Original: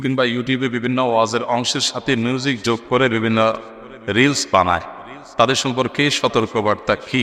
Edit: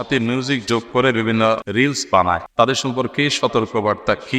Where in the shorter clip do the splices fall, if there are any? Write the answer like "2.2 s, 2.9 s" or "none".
1.7 s, 2.5 s